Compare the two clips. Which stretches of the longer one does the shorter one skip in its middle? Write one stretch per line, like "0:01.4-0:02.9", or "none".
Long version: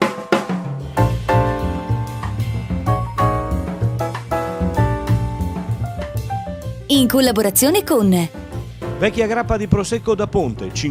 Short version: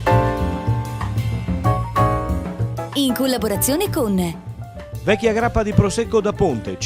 0:04.0-0:06.7